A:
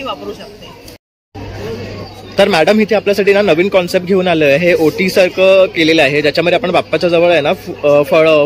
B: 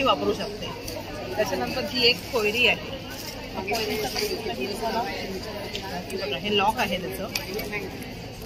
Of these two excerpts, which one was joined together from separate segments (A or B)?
A